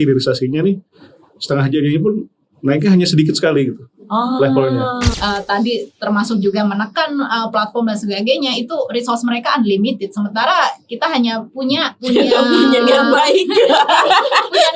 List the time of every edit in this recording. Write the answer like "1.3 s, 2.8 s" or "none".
5.1 s, 11.9 s